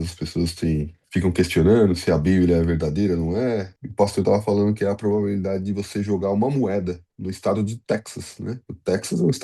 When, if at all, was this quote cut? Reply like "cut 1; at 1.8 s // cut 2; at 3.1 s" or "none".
cut 1; at 1.0 s // cut 2; at 3.8 s